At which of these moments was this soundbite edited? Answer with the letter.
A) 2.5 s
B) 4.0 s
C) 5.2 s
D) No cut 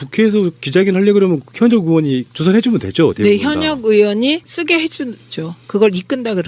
A